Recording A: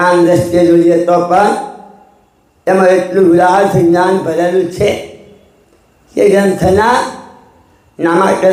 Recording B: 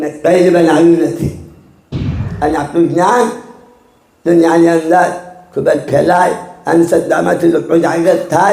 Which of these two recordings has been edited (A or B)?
B